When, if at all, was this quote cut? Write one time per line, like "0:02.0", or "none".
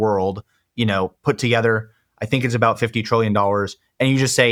none